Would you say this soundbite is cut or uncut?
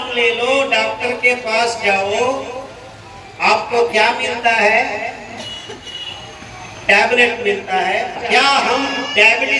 cut